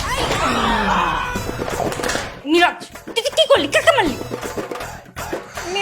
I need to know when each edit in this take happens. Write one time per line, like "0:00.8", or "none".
0:02.4